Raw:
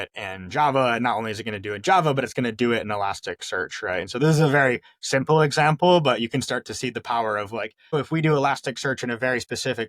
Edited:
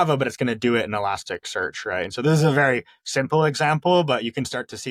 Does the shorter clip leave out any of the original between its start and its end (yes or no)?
no